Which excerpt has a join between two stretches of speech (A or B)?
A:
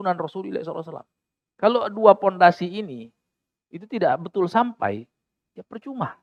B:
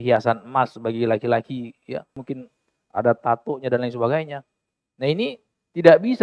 B